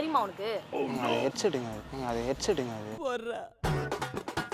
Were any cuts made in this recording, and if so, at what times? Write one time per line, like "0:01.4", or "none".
0:01.8